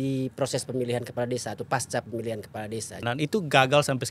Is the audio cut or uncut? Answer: cut